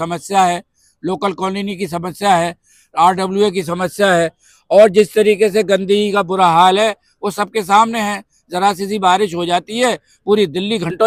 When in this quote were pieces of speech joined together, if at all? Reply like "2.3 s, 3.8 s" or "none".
none